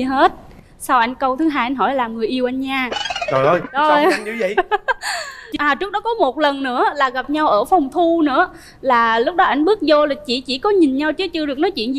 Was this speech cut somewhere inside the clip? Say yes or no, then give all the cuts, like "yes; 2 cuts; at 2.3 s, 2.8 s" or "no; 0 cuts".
yes; 1 cut; at 5.5 s